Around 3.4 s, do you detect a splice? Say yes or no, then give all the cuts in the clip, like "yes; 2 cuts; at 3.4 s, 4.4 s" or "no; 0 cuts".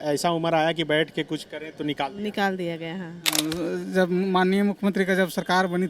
yes; 1 cut; at 3.4 s